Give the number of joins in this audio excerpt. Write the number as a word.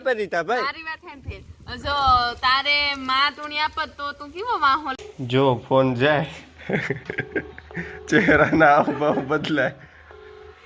one